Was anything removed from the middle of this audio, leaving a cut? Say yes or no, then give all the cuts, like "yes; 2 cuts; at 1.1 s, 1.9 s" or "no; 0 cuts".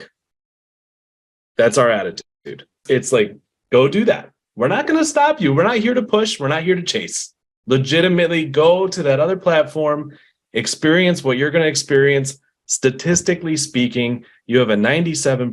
yes; 1 cut; at 2.8 s